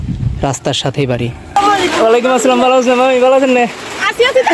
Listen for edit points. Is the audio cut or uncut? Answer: cut